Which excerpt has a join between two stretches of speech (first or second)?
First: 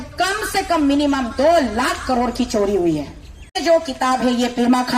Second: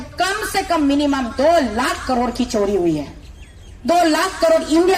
first